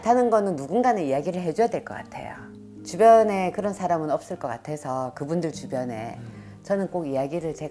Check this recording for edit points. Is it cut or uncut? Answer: uncut